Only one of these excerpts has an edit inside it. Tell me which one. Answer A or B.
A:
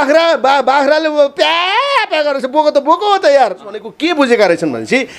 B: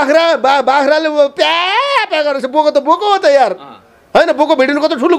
A